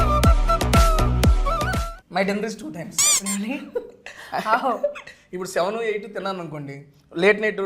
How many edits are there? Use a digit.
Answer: 1